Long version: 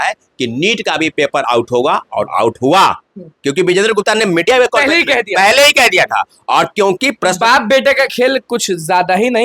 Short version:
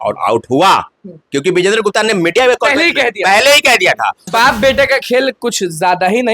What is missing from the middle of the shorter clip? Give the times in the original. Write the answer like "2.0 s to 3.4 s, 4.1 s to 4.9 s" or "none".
6.4 s to 7.4 s